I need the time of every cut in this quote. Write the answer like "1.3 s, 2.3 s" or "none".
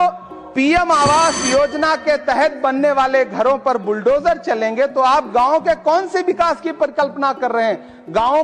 none